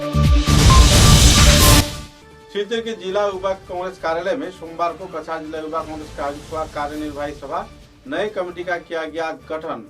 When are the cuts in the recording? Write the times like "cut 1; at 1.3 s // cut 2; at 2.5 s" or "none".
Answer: cut 1; at 1.8 s